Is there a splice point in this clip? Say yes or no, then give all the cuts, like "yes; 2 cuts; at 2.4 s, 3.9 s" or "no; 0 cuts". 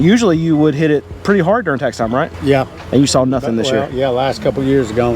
yes; 1 cut; at 2.3 s